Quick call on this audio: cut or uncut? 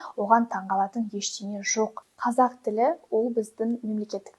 cut